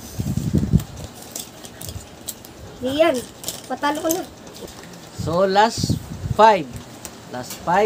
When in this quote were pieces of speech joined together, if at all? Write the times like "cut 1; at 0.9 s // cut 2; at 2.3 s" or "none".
cut 1; at 4.6 s